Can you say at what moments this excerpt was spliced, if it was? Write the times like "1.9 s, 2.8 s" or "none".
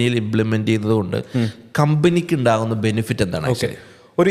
none